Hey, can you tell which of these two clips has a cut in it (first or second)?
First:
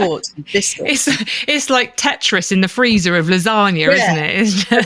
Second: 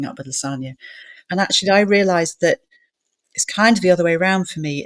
second